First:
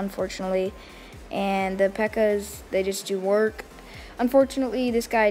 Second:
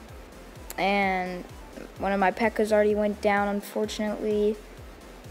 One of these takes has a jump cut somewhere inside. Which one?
second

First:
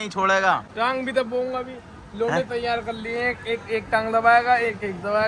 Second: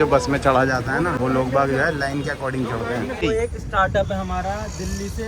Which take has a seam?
second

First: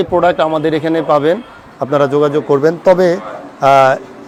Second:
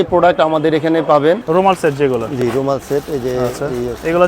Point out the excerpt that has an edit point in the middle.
second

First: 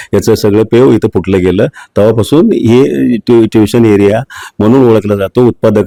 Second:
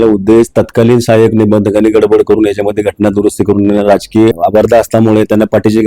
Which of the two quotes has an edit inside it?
second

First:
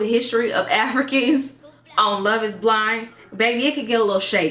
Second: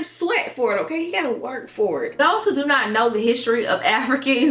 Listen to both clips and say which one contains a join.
second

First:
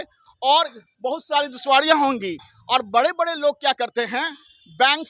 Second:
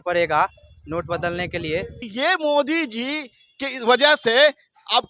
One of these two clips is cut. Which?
second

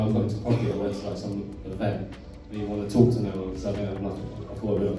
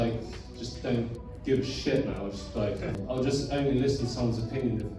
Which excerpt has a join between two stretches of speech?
second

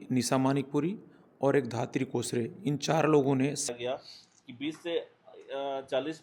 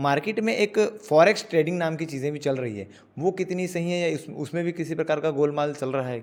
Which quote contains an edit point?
first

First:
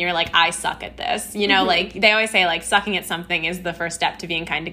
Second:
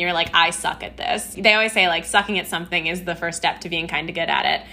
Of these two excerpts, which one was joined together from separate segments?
second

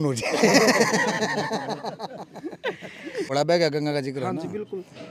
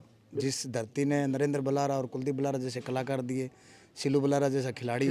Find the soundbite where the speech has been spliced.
first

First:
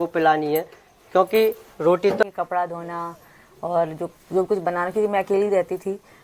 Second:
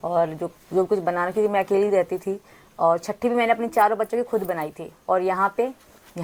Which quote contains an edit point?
first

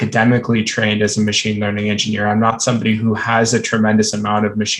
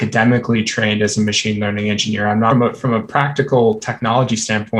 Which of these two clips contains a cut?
second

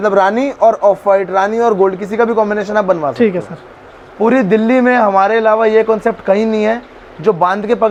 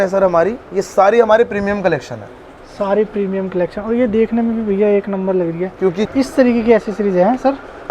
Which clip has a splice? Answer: second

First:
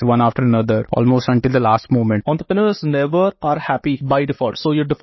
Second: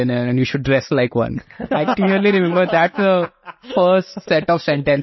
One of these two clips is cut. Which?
first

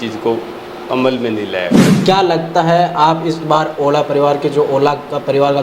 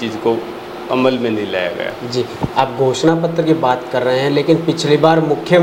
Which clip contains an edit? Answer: first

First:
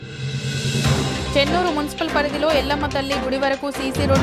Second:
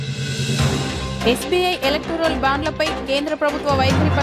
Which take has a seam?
second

